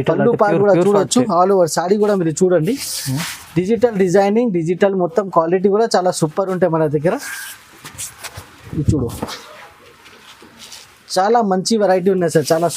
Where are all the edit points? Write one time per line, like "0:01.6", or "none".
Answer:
none